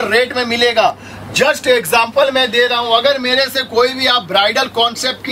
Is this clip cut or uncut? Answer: uncut